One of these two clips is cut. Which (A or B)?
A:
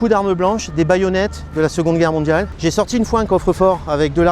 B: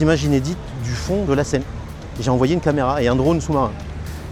A